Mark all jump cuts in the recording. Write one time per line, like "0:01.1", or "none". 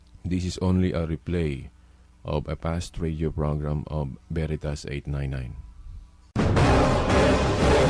0:06.3